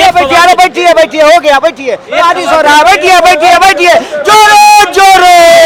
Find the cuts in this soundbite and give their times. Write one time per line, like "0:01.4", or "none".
none